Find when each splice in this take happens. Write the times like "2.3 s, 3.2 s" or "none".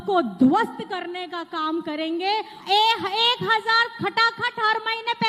2.5 s